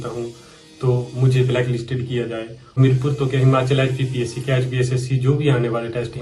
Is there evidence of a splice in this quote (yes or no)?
yes